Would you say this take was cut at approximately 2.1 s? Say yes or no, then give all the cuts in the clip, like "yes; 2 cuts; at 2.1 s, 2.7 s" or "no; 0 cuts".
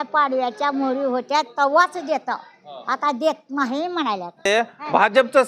no; 1 cut; at 4.5 s